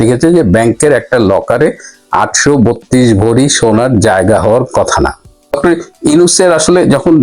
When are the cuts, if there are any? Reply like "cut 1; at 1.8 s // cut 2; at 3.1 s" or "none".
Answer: cut 1; at 5.6 s